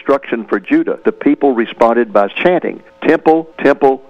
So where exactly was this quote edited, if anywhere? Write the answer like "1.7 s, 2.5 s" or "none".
0.9 s